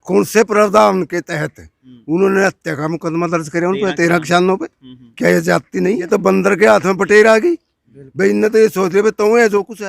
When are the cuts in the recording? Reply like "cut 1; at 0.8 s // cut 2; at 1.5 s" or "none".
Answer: cut 1; at 6.0 s